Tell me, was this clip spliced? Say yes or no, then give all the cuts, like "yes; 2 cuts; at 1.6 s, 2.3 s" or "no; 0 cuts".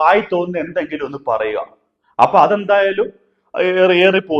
no; 0 cuts